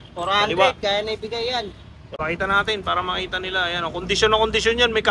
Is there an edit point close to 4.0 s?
no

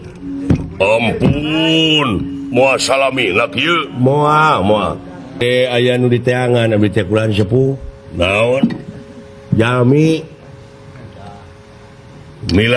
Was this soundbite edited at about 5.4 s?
yes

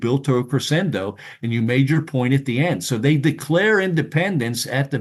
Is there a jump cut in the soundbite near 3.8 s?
no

